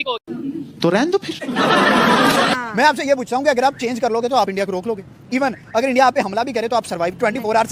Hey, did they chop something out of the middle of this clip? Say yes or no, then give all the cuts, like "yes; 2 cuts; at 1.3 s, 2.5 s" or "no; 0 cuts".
yes; 1 cut; at 2.5 s